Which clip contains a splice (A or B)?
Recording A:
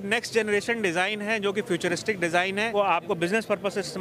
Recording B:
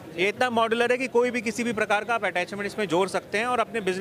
A